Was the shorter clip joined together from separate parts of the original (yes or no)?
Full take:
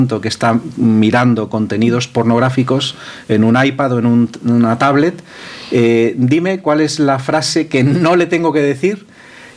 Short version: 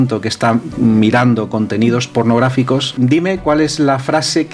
yes